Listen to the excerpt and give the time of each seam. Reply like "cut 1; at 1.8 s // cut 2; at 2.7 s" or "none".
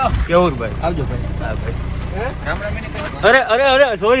cut 1; at 3.0 s